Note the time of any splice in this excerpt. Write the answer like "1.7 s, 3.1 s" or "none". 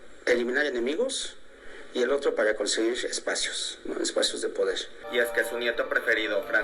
4.9 s